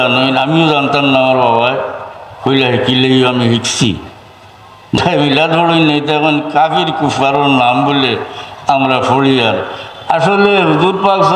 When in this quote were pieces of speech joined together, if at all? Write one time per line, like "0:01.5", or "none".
0:05.0